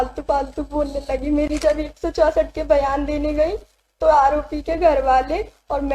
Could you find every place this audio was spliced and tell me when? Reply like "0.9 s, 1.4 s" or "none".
1.5 s